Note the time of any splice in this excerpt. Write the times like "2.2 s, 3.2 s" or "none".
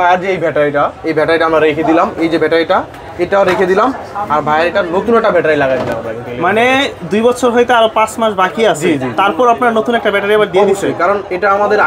none